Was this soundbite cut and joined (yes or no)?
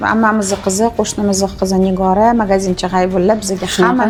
no